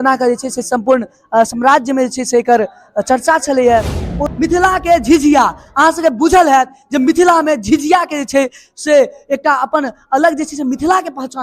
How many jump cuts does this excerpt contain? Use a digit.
1